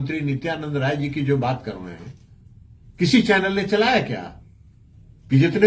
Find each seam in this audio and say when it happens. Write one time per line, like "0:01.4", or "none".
none